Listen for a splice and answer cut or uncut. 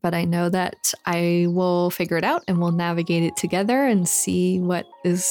uncut